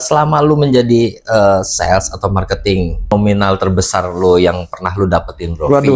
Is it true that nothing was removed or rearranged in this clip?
no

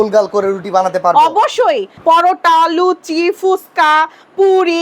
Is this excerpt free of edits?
no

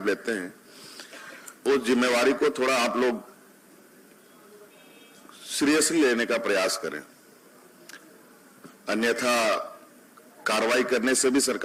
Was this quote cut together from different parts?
no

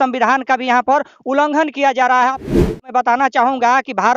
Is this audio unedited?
no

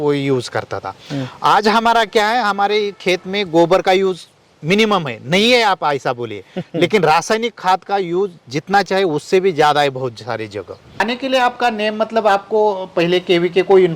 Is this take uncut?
no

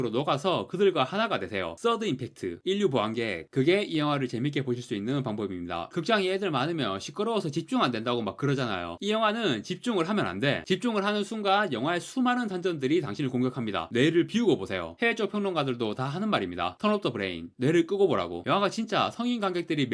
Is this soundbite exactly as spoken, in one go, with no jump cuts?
yes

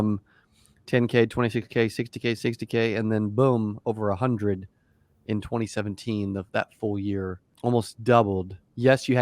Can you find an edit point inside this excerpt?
yes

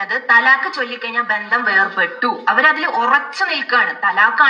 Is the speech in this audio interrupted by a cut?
no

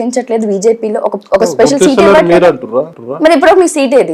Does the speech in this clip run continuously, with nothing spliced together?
no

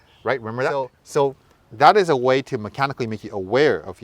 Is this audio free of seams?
no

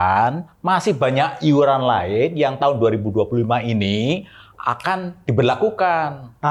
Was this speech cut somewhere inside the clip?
no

